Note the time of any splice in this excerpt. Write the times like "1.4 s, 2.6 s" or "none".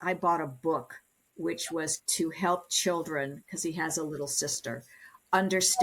2.0 s